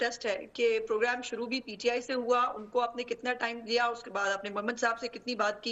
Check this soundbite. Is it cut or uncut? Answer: uncut